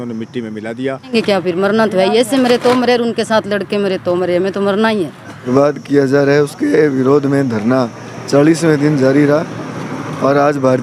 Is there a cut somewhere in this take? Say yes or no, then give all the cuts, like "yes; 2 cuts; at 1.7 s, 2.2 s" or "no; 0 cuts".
yes; 2 cuts; at 1.1 s, 5.5 s